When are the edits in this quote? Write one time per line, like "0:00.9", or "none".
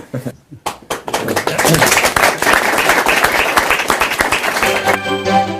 none